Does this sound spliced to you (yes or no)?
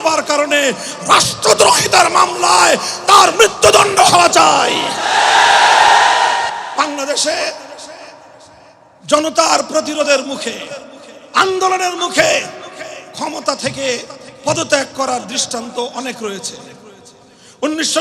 yes